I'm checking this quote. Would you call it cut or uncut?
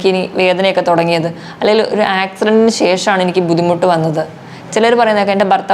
uncut